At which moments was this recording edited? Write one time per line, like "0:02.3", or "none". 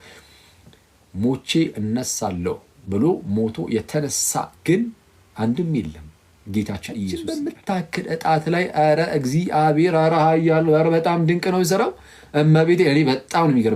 0:07.2